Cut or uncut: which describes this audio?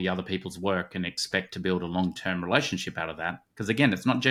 uncut